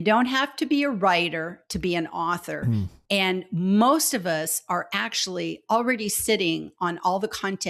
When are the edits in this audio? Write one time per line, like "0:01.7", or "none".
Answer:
none